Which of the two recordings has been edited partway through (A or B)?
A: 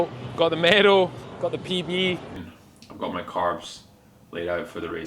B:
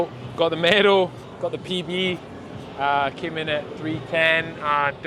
A